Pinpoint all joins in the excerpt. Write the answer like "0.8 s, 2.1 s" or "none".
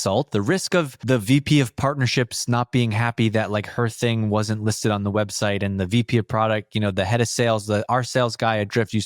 1.0 s